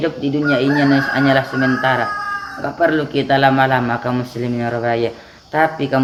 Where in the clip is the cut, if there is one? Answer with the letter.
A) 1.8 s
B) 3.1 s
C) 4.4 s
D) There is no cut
D